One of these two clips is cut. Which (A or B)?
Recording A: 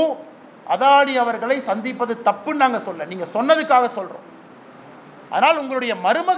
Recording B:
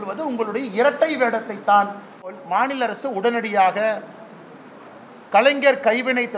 B